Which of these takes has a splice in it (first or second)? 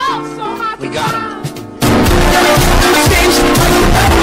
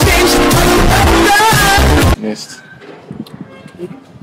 second